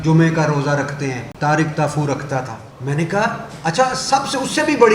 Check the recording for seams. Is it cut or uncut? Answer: cut